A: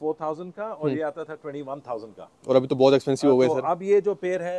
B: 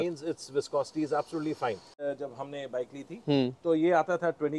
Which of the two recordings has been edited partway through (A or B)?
B